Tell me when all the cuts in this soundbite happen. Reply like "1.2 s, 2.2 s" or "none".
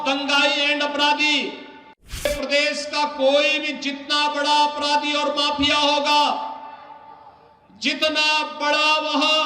2.2 s